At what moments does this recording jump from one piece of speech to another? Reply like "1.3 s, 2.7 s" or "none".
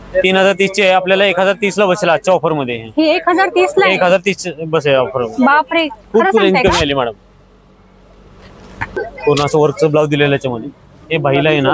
9.0 s